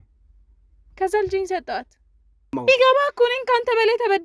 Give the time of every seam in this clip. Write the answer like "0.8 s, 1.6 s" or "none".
2.5 s